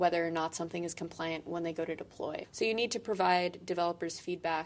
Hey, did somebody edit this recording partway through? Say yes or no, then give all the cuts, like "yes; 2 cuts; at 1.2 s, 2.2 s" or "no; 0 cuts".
yes; 1 cut; at 2.5 s